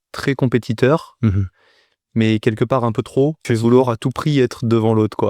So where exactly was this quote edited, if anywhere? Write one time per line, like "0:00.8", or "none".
0:03.4